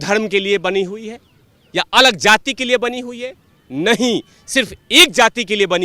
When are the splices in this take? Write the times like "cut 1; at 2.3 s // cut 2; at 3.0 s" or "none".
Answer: none